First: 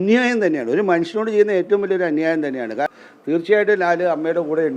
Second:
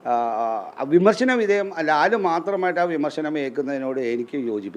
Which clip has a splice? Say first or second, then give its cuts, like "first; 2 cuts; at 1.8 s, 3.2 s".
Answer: first; 1 cut; at 2.9 s